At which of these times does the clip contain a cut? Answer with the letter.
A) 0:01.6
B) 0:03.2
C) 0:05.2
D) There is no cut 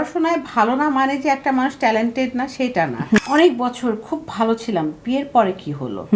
B